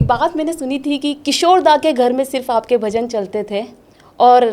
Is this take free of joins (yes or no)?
yes